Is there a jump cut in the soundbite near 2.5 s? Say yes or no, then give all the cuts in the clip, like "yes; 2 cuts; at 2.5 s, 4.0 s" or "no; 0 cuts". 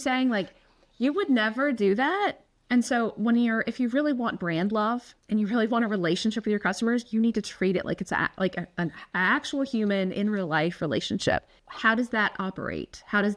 yes; 3 cuts; at 2.5 s, 5.1 s, 11.6 s